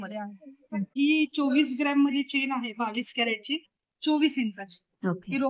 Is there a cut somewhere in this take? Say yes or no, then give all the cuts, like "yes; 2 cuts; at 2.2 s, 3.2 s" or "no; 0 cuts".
yes; 1 cut; at 0.9 s